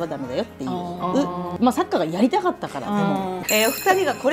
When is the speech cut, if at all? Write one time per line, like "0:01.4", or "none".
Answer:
0:01.5
0:03.4